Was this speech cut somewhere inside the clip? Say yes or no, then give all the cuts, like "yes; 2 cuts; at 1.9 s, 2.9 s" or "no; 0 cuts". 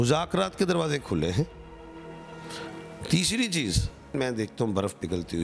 yes; 1 cut; at 4.1 s